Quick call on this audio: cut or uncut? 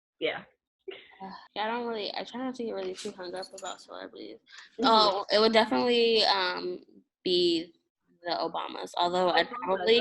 cut